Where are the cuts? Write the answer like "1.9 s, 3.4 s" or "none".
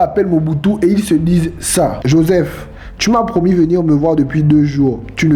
2.0 s

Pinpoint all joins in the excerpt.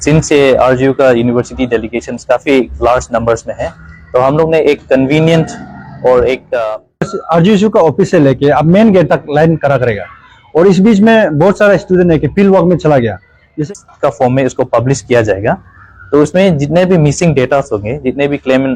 7.2 s, 13.6 s

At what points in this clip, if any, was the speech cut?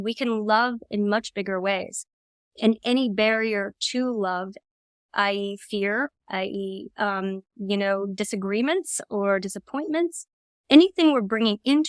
none

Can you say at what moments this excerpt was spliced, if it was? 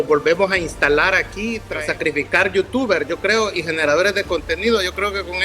1.6 s

